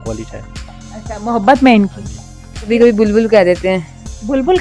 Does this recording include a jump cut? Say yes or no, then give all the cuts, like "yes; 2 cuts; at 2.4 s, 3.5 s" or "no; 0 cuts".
yes; 1 cut; at 2.7 s